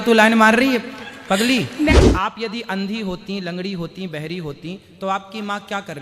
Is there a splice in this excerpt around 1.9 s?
yes; 1 cut; at 1.9 s

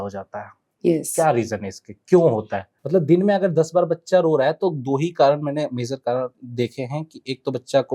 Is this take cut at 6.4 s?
no; 1 cut; at 2.7 s

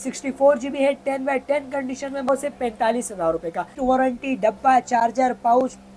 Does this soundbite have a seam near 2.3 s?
yes; 2 cuts; at 2.3 s, 3.8 s

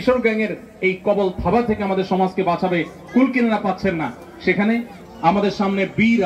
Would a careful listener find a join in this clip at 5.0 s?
yes; 1 cut; at 5.0 s

